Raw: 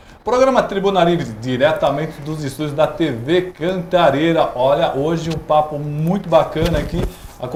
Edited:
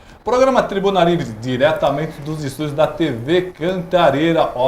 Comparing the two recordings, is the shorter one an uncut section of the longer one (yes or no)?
yes